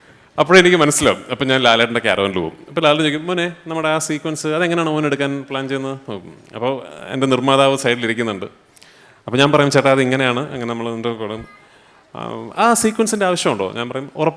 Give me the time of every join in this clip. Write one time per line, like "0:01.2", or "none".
none